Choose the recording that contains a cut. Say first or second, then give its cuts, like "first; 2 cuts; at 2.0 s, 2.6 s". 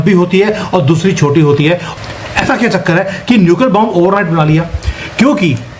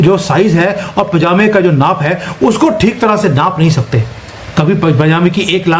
first; 1 cut; at 1.9 s